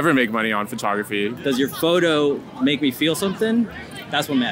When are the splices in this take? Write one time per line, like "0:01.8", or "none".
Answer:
0:01.4